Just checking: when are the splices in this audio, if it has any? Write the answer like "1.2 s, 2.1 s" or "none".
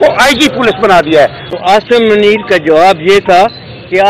1.8 s